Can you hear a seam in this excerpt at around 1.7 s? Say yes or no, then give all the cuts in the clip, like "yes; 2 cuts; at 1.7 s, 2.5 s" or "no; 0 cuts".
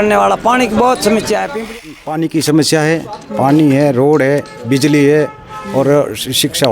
yes; 1 cut; at 1.7 s